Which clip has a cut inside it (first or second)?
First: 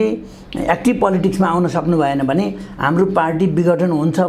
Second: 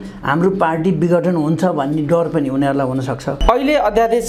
second